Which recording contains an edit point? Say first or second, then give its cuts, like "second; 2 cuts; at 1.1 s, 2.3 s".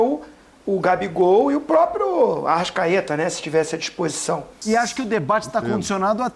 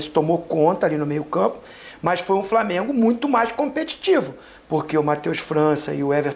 first; 1 cut; at 4.5 s